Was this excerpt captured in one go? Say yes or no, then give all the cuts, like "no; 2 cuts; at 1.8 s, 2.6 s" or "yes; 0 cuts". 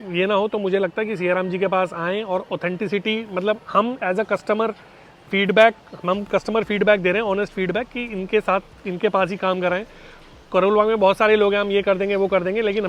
yes; 0 cuts